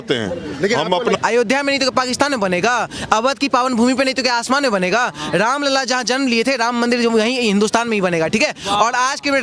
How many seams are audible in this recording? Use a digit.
1